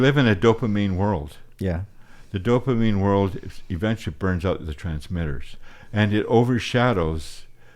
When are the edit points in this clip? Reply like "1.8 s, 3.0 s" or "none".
none